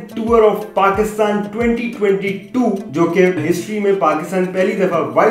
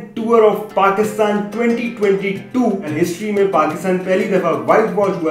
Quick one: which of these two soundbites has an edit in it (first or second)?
second